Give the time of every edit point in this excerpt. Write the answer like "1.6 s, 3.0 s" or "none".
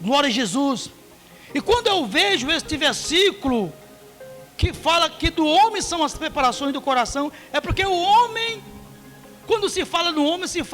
none